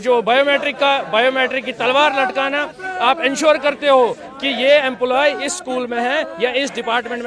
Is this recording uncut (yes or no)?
yes